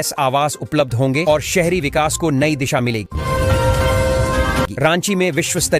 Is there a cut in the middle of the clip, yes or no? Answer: no